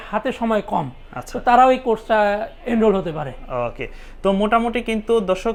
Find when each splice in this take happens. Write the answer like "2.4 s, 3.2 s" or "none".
none